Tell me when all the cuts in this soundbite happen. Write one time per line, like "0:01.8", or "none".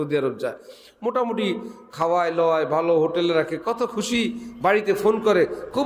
none